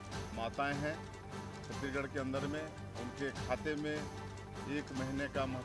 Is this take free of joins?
yes; 0 cuts

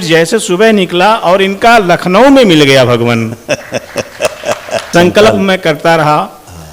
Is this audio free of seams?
no; 1 cut; at 4.9 s

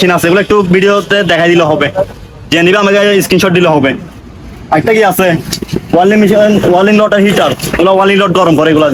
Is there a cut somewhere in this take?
no; 0 cuts

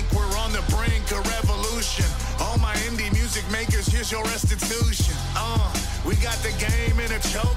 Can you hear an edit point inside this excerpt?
no; 0 cuts

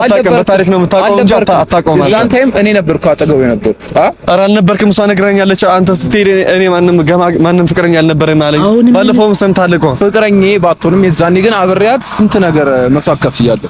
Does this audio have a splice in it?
no; 0 cuts

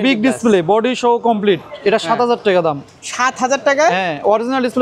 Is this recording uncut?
yes; 0 cuts

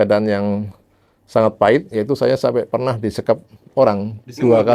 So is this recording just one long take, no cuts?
yes; 0 cuts

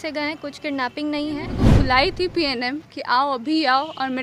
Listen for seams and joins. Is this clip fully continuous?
no; 1 cut; at 1.6 s

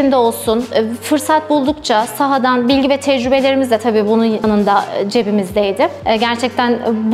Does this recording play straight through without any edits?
no; 2 cuts; at 4.4 s, 6.0 s

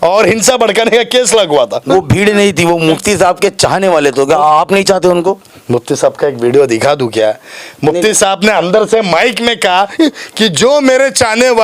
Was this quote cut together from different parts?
no; 0 cuts

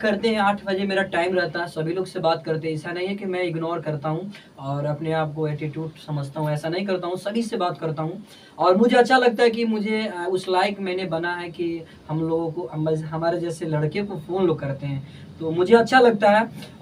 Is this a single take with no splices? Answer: yes; 0 cuts

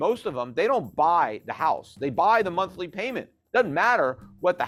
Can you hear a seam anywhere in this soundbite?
no; 0 cuts

